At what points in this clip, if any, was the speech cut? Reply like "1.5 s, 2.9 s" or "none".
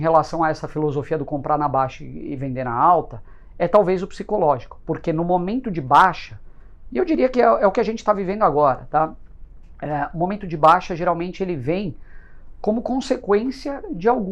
none